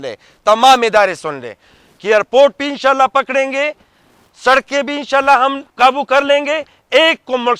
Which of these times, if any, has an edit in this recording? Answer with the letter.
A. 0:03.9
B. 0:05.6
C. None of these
B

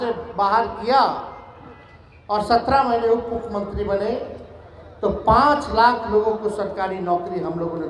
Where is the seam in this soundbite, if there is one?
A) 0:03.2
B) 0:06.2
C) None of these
C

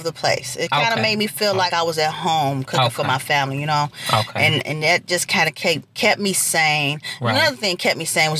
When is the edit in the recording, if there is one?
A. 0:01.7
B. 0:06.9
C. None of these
A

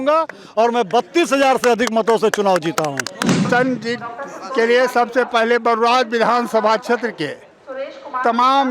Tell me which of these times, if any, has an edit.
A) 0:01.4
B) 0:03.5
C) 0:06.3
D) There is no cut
B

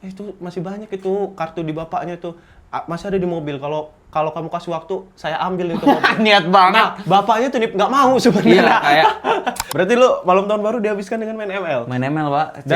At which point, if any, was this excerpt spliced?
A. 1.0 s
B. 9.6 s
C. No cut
B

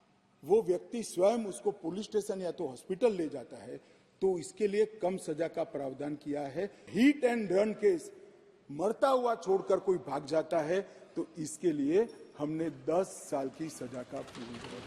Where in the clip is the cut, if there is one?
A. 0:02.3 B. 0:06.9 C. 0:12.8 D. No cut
B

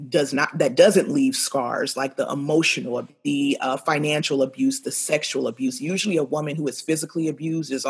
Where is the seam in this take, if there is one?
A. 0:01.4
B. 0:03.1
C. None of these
B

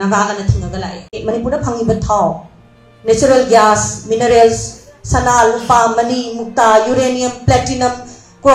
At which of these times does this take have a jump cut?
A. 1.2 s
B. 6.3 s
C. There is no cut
A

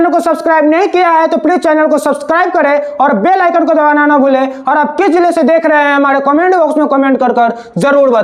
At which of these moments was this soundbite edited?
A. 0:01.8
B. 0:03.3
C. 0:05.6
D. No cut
D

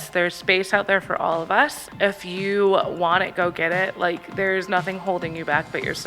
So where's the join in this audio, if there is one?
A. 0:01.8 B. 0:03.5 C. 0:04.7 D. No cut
A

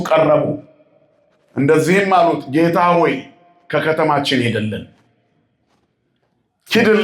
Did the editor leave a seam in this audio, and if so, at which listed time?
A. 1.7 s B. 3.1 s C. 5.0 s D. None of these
D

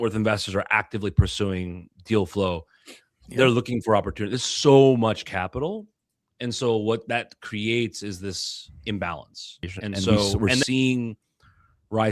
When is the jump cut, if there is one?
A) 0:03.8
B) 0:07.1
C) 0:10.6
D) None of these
C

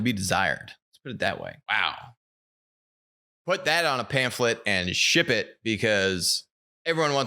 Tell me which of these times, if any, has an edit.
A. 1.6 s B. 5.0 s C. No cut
A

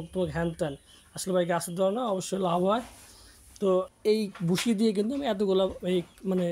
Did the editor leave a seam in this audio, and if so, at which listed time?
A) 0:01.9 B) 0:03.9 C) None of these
B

